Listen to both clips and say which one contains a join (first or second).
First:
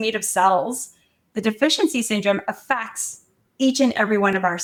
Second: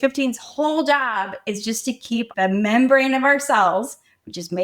second